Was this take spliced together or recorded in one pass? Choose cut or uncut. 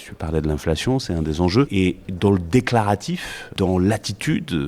cut